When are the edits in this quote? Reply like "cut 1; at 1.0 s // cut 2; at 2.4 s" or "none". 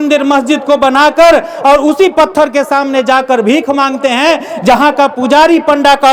none